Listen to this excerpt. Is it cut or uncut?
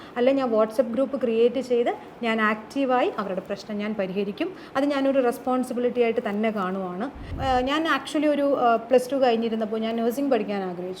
cut